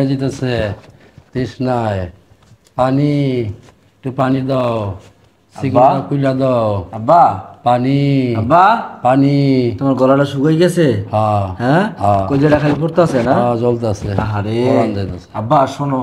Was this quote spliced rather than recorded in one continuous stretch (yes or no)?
no